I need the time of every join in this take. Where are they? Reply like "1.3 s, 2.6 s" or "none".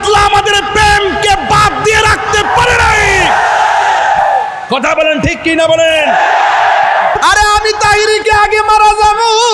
7.2 s